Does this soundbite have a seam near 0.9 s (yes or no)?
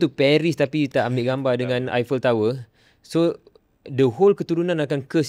yes